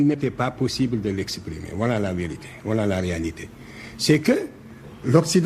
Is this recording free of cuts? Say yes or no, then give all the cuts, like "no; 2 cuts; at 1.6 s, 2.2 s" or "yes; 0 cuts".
yes; 0 cuts